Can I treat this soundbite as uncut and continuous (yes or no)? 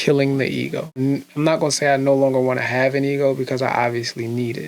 no